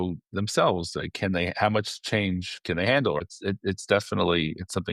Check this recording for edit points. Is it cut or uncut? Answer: cut